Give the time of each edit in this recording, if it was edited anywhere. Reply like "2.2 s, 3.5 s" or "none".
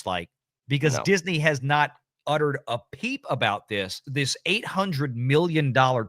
4.0 s

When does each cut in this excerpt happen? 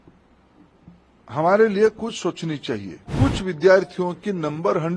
3.0 s

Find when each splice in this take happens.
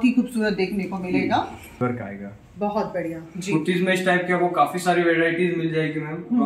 1.8 s

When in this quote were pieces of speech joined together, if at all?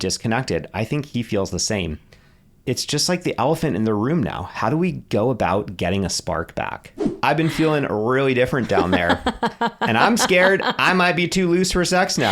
7.1 s

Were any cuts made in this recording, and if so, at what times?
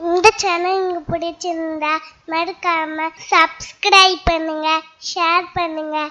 3.2 s

